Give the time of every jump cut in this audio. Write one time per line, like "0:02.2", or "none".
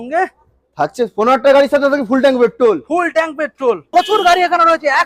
0:03.8